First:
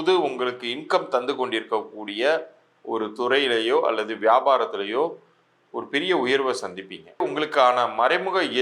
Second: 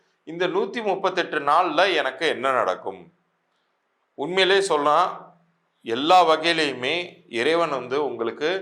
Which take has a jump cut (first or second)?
first